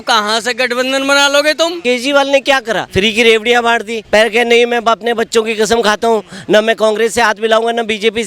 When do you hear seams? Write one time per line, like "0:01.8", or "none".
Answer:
0:01.8
0:02.8
0:03.9